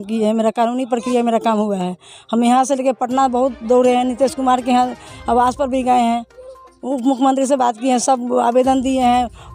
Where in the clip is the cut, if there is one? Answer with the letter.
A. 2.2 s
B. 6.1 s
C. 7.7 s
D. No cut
D